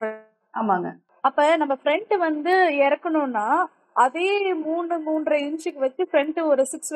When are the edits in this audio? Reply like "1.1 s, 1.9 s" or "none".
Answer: 1.0 s